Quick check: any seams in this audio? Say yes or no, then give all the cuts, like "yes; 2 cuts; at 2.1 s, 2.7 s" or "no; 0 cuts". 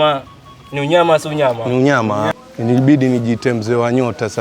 yes; 1 cut; at 2.4 s